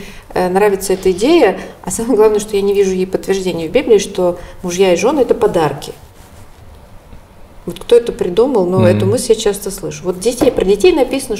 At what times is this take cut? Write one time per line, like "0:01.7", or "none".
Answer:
none